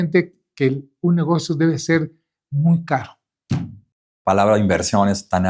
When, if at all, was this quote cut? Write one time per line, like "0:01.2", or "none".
0:04.1